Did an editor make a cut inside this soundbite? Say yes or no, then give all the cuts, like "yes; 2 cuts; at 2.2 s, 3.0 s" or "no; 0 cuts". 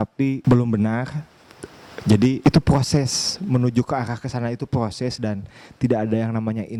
no; 0 cuts